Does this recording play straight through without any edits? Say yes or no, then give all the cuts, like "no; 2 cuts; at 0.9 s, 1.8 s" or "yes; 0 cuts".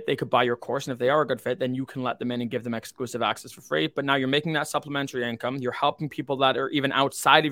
yes; 0 cuts